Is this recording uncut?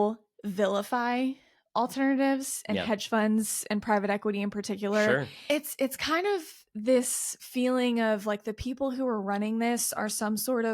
no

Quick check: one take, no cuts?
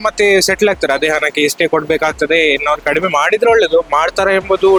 yes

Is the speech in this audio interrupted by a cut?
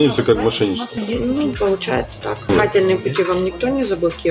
yes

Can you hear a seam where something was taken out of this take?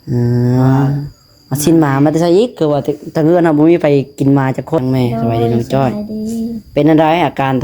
yes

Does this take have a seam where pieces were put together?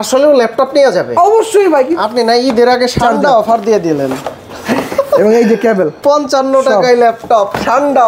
yes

